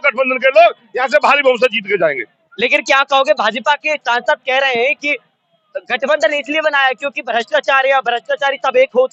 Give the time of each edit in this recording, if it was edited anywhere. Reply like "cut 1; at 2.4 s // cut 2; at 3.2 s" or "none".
none